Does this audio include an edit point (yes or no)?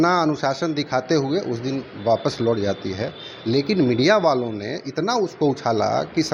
no